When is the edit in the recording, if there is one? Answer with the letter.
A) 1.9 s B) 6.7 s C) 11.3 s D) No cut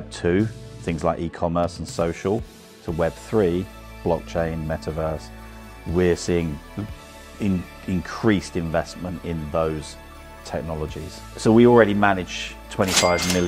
C